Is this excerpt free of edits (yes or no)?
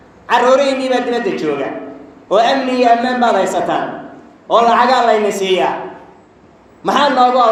yes